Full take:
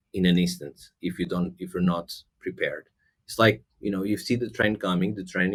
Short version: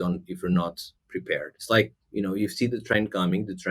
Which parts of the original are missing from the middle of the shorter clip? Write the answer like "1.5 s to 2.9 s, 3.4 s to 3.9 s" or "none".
2.8 s to 3.2 s